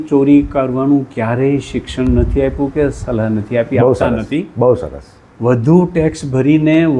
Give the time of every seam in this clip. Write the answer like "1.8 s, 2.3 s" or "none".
none